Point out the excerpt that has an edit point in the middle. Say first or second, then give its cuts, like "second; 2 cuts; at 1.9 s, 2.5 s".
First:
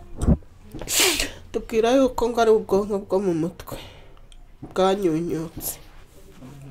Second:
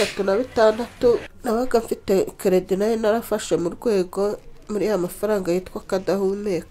second; 1 cut; at 1.2 s